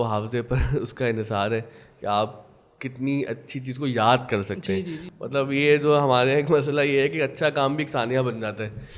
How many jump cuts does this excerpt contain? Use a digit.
1